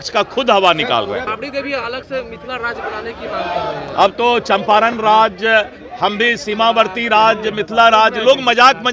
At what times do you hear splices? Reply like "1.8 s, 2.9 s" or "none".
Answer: 1.3 s